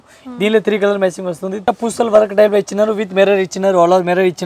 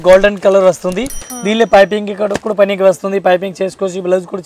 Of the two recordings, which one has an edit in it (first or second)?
first